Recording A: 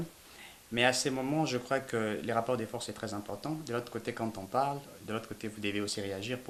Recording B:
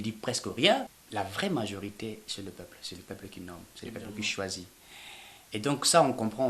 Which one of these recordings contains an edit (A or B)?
B